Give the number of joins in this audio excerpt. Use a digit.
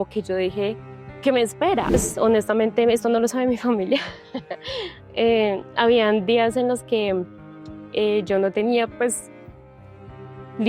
1